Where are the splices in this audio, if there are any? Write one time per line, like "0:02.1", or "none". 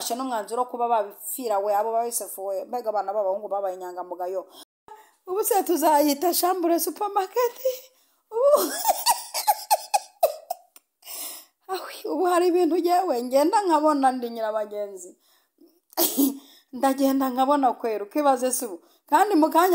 0:04.9